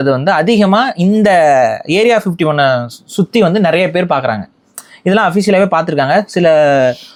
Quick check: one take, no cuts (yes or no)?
yes